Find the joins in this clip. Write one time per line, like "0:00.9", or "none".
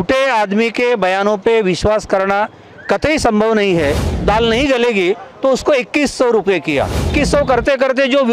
0:04.1
0:07.1